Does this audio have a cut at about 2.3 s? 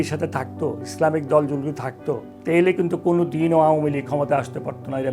yes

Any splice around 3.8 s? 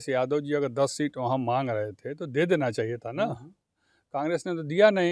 no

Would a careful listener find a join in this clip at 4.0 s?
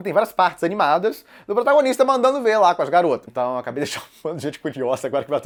no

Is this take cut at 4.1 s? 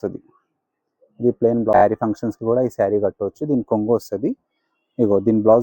no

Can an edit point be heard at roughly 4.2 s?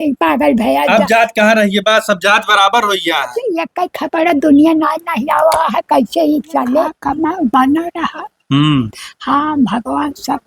no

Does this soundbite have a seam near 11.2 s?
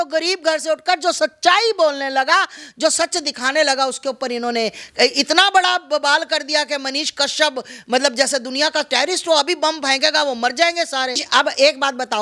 yes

